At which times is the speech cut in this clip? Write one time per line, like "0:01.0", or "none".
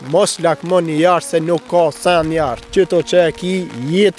0:02.6